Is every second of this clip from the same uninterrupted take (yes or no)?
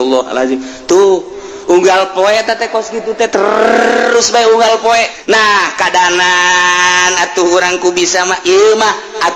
no